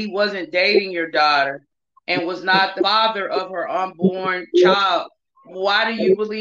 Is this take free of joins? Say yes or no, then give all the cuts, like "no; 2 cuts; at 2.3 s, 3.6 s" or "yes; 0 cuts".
no; 1 cut; at 2.8 s